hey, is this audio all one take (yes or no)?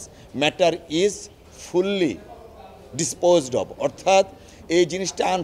yes